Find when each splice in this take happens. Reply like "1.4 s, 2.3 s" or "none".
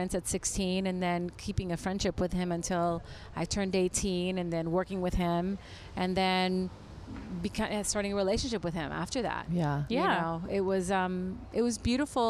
none